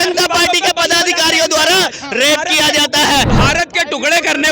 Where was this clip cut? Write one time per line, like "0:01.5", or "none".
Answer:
0:03.3